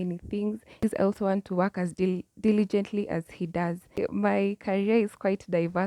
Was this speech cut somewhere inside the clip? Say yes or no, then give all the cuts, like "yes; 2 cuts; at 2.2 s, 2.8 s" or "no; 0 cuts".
yes; 2 cuts; at 0.8 s, 4.0 s